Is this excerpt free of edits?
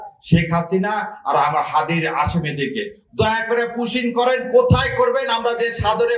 yes; 0 cuts

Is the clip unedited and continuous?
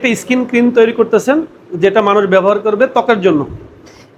yes; 0 cuts

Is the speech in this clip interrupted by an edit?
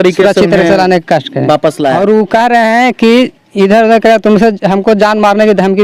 yes; 1 cut; at 1.9 s

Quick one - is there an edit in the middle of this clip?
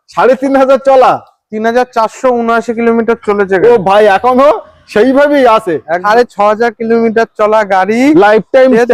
yes; 1 cut; at 5.9 s

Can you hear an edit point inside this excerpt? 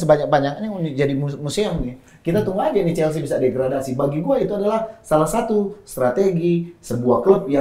no; 0 cuts

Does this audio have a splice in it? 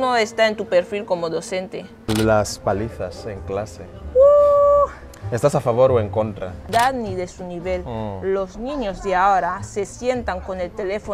yes; 2 cuts; at 2.0 s, 6.6 s

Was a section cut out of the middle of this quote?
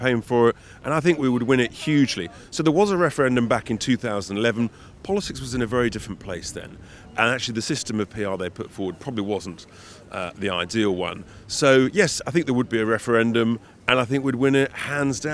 no; 0 cuts

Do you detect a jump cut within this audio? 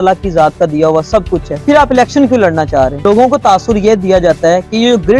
yes; 2 cuts; at 1.5 s, 3.0 s

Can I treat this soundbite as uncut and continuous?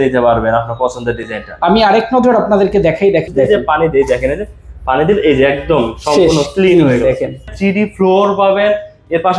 no; 2 cuts; at 3.3 s, 7.5 s

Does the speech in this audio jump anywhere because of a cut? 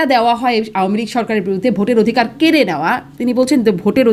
no; 0 cuts

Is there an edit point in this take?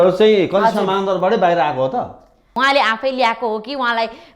yes; 1 cut; at 2.5 s

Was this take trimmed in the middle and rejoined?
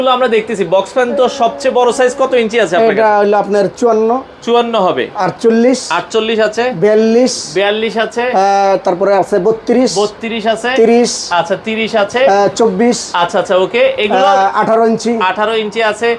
no; 0 cuts

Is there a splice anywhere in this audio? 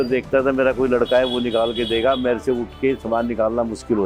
no; 0 cuts

